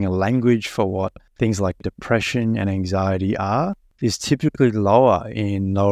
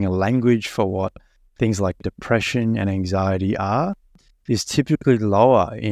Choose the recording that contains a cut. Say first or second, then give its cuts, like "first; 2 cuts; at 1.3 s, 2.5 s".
first; 2 cuts; at 1.2 s, 3.8 s